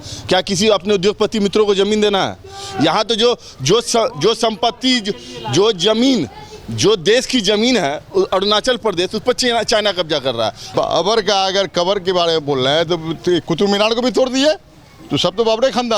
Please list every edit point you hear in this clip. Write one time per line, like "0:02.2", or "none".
0:10.6